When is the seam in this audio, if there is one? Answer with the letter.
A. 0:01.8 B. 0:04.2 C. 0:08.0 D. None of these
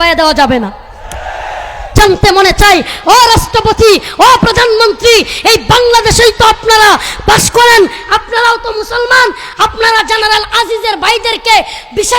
A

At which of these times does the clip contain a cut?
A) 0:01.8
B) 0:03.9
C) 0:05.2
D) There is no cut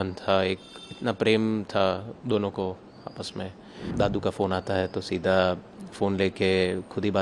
B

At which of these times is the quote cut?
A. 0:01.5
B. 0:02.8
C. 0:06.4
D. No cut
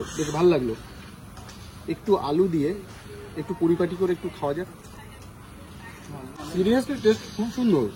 C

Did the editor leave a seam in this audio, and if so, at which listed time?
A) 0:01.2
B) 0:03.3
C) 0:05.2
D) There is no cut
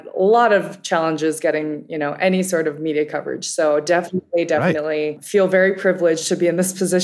C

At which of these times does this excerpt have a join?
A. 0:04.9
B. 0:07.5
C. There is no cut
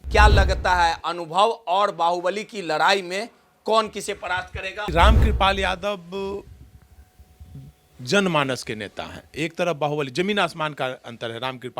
A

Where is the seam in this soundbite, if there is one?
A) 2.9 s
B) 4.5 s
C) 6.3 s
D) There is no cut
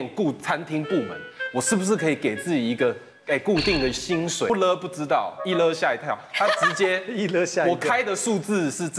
B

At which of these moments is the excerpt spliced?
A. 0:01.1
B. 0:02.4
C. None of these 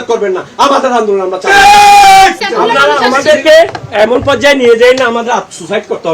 B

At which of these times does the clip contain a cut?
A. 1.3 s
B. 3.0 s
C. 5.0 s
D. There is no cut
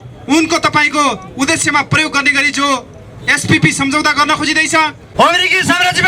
C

